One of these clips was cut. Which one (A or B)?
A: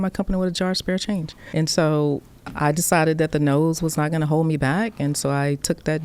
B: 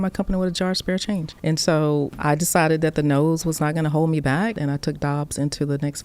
B